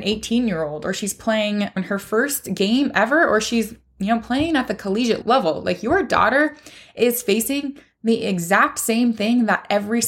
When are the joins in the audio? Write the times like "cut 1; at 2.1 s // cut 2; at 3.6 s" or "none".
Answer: cut 1; at 1.8 s // cut 2; at 5.2 s